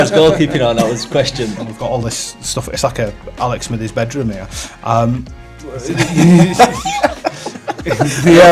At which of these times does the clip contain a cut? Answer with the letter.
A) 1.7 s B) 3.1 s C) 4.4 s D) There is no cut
A